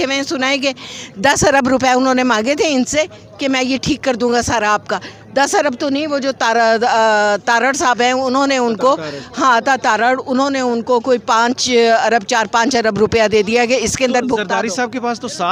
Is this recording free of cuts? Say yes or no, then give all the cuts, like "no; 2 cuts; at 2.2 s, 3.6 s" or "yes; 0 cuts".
yes; 0 cuts